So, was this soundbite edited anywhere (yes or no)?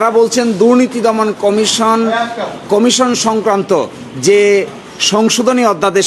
no